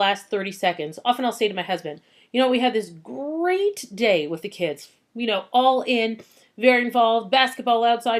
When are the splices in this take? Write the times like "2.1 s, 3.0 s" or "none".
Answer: 7.2 s